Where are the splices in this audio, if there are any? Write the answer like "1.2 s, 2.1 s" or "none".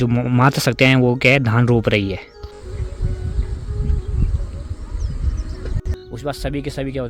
2.6 s, 6.0 s